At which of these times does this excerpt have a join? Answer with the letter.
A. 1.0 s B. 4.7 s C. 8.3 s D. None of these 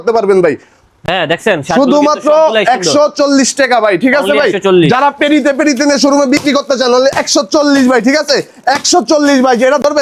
D